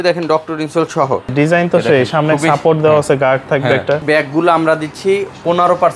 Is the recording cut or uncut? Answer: cut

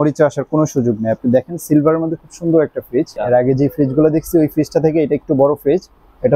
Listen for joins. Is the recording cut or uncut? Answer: cut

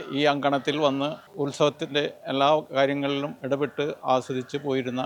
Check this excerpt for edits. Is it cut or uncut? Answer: uncut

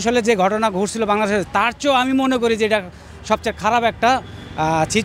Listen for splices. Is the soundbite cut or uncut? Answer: uncut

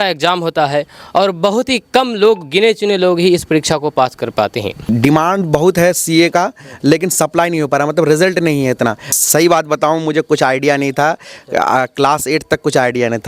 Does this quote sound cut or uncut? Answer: cut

